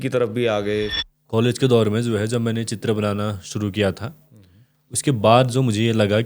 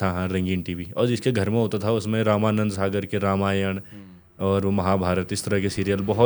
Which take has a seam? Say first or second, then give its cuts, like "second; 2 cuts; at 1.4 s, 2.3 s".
first; 1 cut; at 1.0 s